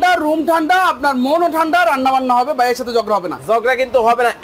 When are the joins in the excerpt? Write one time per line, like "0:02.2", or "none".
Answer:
none